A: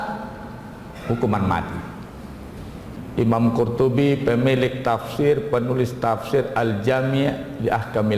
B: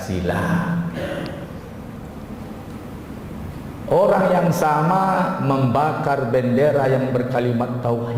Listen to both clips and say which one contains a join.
A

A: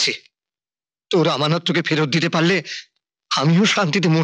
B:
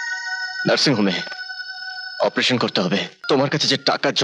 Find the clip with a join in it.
B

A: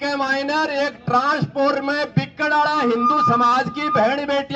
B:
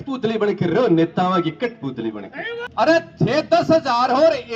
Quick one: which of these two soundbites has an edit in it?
B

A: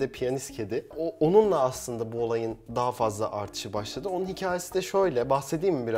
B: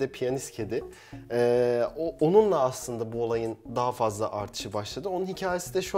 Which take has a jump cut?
A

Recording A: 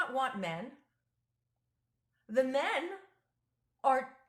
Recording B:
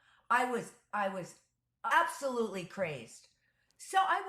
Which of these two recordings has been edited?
B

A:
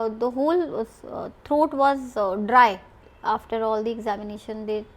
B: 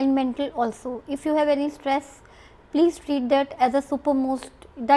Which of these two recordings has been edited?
A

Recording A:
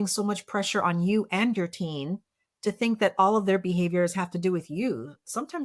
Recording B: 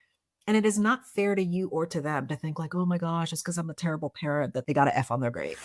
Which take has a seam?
B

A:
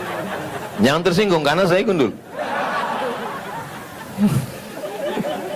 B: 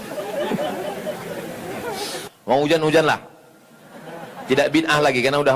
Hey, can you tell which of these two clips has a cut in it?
B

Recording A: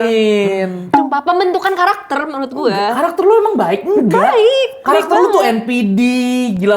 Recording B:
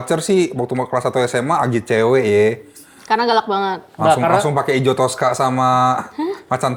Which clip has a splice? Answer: A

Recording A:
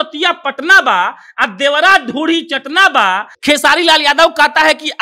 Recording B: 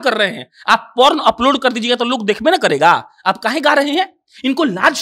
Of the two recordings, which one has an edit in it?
A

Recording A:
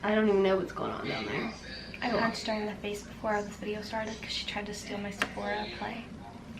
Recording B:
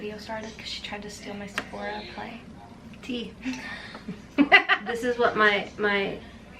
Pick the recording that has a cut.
B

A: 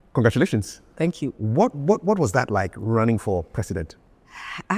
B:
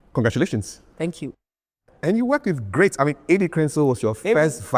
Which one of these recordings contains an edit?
B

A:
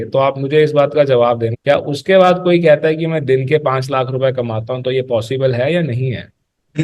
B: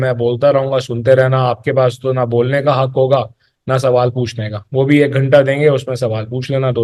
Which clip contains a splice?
A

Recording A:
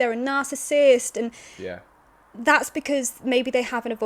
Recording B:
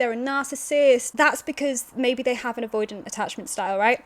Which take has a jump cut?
B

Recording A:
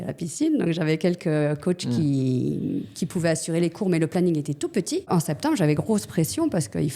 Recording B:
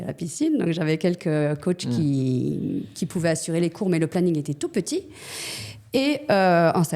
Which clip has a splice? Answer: A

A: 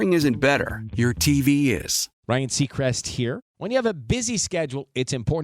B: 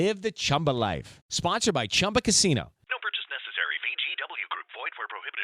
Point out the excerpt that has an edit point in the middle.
A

